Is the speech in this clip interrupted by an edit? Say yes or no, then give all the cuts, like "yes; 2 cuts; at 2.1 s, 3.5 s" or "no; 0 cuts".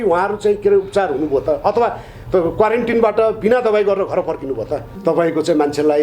yes; 1 cut; at 4.8 s